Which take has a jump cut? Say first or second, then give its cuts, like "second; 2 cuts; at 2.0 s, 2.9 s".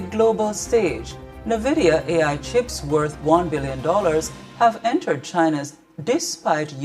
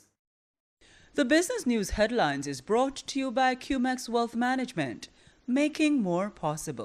first; 2 cuts; at 1.9 s, 4.8 s